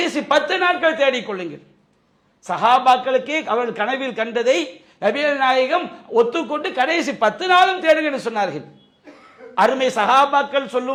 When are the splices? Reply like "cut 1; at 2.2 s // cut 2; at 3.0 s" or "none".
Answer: none